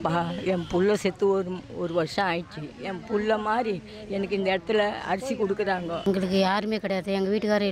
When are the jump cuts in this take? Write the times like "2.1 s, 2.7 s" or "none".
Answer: 6.1 s